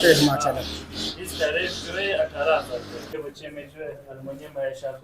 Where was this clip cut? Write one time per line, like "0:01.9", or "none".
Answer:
0:03.0